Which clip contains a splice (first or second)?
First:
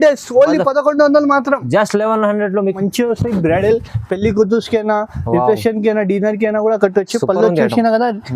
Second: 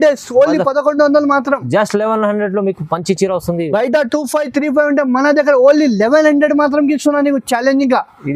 first